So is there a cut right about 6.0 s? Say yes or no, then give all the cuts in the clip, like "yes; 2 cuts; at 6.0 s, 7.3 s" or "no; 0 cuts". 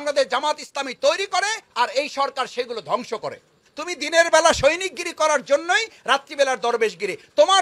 no; 1 cut; at 3.7 s